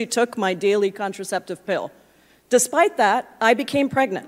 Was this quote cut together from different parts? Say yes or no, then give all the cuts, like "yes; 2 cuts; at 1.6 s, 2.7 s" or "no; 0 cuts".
no; 0 cuts